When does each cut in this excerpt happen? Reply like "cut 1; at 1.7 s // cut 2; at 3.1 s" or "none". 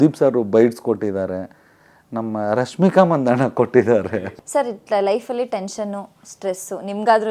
cut 1; at 4.3 s

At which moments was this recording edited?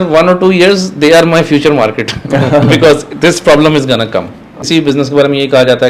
cut 1; at 4.5 s

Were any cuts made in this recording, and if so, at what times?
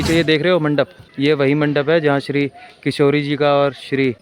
cut 1; at 1.0 s

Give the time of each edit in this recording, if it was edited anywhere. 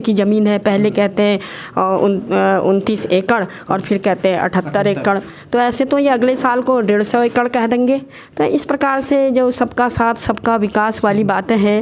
none

